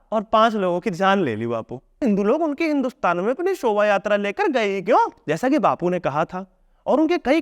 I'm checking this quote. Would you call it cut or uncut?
cut